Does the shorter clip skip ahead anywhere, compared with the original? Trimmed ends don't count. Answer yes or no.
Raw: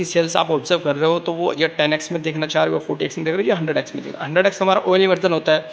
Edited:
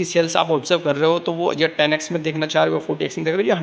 no